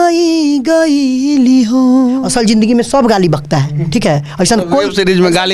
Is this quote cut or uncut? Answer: cut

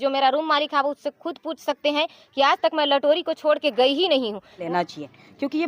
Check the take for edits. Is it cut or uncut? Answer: cut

